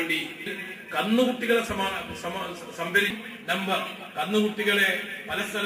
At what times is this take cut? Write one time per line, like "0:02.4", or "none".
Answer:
none